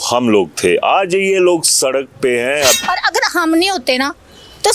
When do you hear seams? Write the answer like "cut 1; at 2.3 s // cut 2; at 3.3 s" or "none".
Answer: cut 1; at 2.8 s